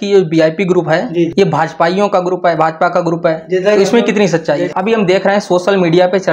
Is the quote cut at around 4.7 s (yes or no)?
yes